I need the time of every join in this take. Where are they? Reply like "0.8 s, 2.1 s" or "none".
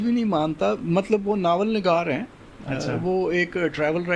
none